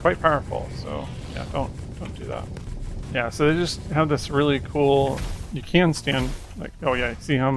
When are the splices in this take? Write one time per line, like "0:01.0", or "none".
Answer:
0:03.0